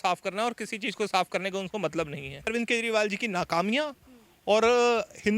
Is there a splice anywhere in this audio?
yes; 1 cut; at 2.5 s

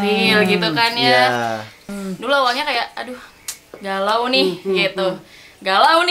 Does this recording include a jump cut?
yes; 1 cut; at 1.9 s

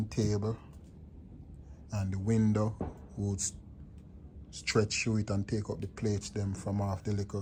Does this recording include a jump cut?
no; 0 cuts

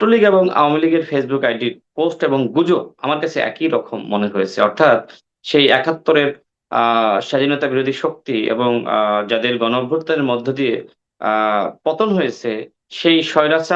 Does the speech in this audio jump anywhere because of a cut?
no; 0 cuts

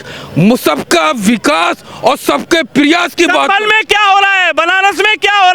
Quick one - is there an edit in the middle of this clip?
no; 0 cuts

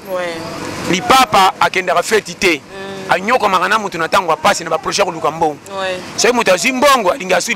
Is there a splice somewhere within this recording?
no; 0 cuts

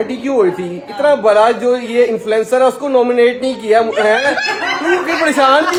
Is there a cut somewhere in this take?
no; 0 cuts

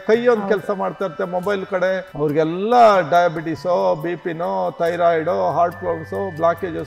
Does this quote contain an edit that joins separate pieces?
yes; 1 cut; at 2.1 s

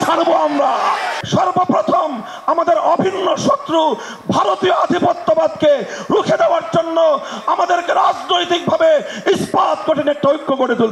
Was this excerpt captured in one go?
no; 1 cut; at 1.2 s

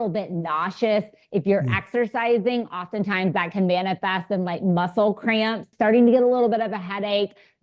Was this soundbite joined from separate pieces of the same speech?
yes; 1 cut; at 5.7 s

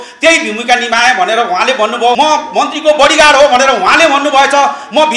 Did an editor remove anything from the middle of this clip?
yes; 1 cut; at 2.2 s

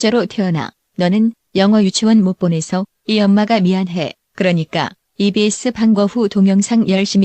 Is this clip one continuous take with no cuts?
no; 1 cut; at 3.9 s

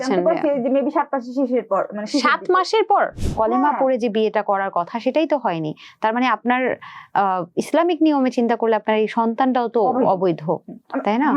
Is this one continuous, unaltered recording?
no; 1 cut; at 3.2 s

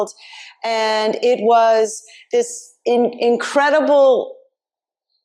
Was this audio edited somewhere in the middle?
no; 0 cuts

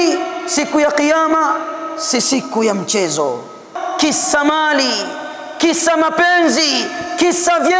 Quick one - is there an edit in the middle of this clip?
yes; 1 cut; at 3.8 s

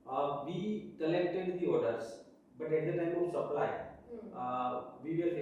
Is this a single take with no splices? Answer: yes; 0 cuts

